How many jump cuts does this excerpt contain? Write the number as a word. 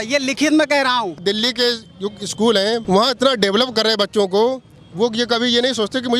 two